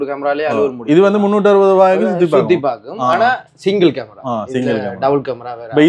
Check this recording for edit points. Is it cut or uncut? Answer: uncut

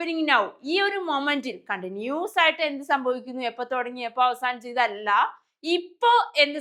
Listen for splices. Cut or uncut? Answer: uncut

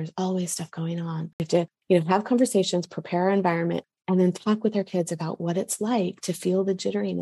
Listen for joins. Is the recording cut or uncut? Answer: cut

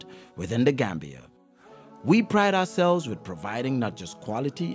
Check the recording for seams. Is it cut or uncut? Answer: uncut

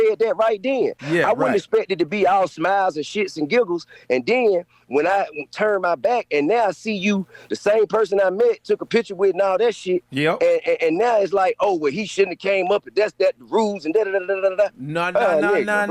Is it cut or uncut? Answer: uncut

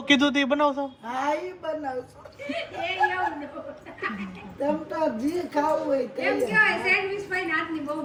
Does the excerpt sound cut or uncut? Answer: uncut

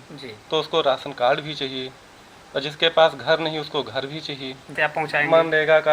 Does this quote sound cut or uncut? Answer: cut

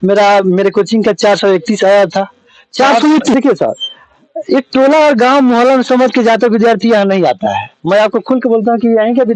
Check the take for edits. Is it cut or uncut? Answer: cut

